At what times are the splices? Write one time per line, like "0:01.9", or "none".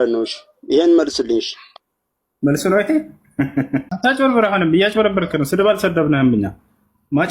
0:03.9